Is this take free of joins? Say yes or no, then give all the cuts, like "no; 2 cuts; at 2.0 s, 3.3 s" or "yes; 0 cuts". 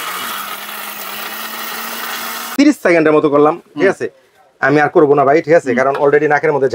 no; 1 cut; at 2.4 s